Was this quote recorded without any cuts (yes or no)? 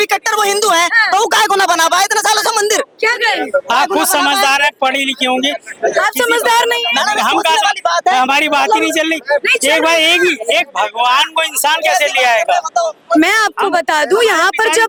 yes